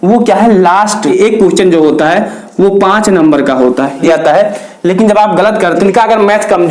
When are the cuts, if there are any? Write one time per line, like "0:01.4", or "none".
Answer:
0:01.1
0:04.1
0:05.8